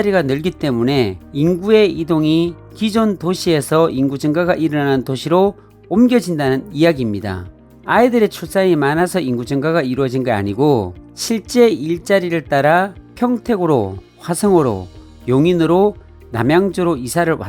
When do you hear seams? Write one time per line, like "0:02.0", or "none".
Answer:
none